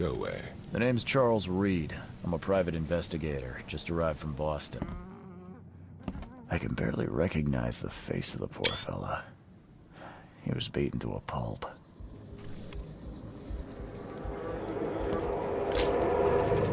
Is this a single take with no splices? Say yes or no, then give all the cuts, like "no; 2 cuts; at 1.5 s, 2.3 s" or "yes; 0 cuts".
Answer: no; 1 cut; at 4.7 s